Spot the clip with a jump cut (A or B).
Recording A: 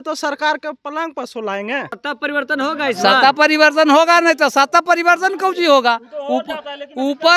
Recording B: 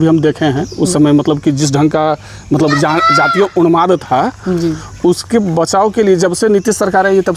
A